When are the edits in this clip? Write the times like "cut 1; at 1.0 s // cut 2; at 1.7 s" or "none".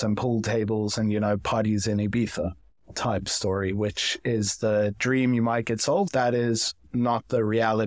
cut 1; at 6.1 s

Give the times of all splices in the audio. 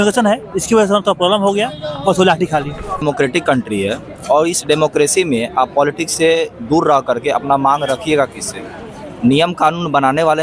cut 1; at 3.0 s

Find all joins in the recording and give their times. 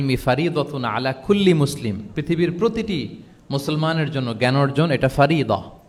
none

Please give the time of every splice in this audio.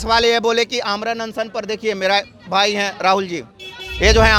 none

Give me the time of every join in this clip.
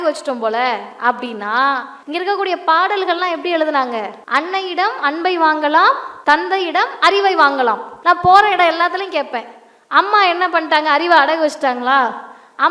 cut 1; at 1.9 s // cut 2; at 4.2 s // cut 3; at 6.1 s // cut 4; at 7.9 s

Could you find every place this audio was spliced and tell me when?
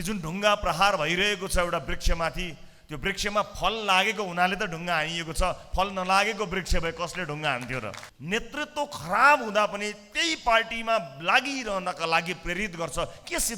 cut 1; at 8.1 s

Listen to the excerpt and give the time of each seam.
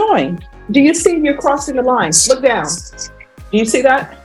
none

